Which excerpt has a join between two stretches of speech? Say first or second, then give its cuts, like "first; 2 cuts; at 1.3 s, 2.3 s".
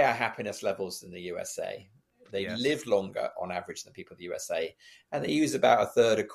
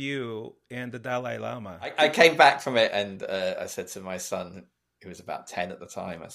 second; 1 cut; at 1.9 s